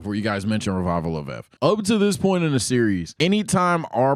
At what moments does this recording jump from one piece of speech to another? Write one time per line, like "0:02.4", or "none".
0:01.4
0:03.1